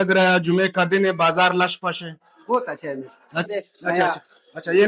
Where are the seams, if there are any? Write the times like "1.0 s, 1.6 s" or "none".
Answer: 3.5 s